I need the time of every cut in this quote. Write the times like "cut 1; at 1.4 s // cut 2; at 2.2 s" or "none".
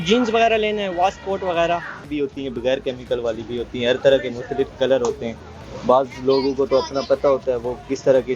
cut 1; at 2.1 s